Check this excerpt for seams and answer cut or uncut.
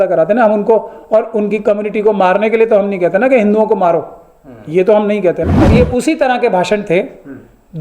cut